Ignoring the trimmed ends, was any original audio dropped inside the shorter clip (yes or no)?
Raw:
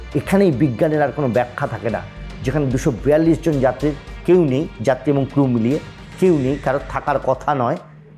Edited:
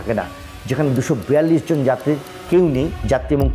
no